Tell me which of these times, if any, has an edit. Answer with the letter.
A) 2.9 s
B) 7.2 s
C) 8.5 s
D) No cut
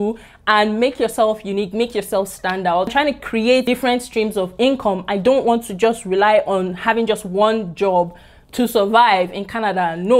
A